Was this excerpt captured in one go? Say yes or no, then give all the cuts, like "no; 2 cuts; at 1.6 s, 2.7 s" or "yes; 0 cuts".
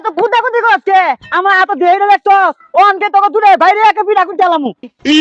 yes; 0 cuts